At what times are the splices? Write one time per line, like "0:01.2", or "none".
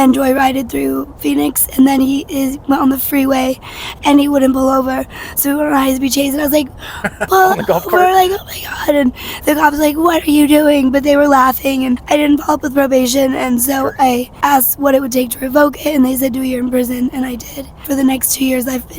0:12.0
0:14.3
0:17.8

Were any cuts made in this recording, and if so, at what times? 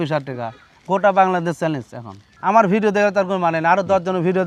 none

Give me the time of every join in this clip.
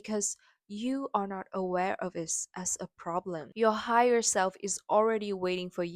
0:03.5

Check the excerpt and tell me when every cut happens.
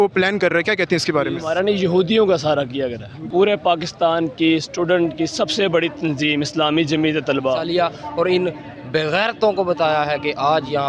0:01.5
0:03.2
0:07.6

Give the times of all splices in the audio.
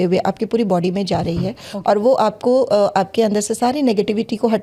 none

